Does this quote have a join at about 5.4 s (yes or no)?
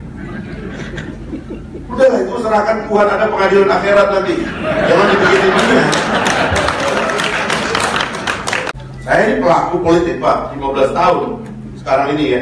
no